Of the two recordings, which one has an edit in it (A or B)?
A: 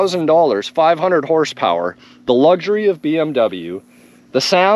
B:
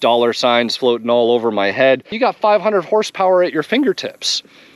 B